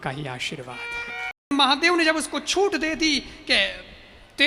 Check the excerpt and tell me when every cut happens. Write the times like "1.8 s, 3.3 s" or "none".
1.5 s

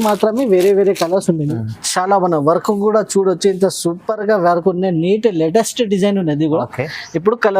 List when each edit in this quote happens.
1.6 s

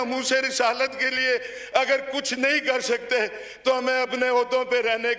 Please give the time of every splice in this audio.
none

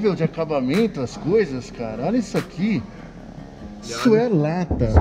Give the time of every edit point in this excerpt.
3.9 s

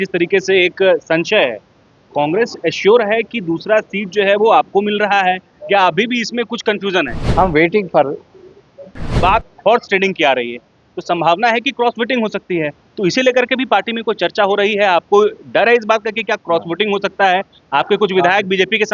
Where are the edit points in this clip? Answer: 7.2 s, 9.1 s

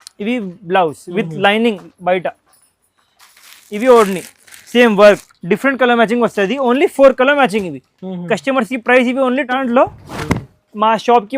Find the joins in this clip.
5.1 s, 9.5 s

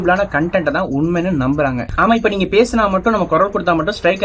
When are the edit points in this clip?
1.9 s

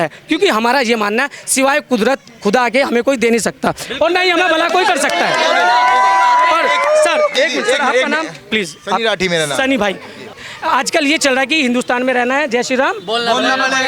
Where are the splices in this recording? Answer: none

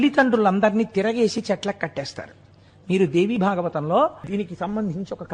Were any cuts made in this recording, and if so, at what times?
4.3 s

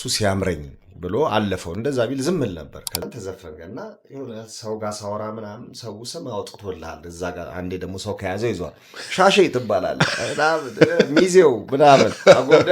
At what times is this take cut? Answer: 3.0 s

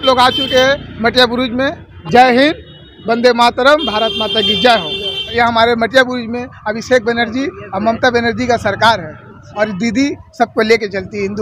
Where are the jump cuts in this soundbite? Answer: 1.9 s, 5.3 s, 9.4 s

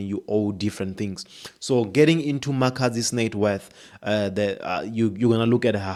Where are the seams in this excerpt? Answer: none

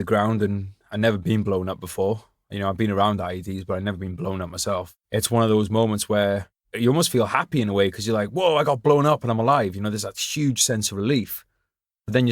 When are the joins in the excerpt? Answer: 5.0 s

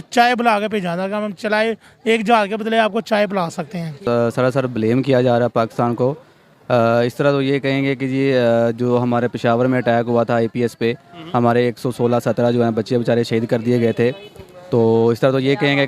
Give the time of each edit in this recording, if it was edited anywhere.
4.0 s

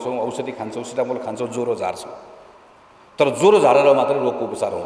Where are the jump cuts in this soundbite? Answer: none

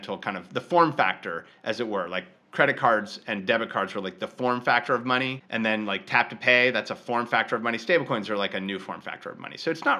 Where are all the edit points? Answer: none

